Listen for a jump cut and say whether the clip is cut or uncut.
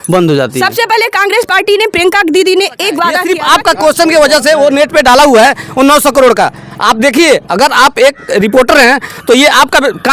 cut